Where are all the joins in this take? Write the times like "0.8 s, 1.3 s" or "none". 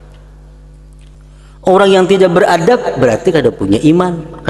1.1 s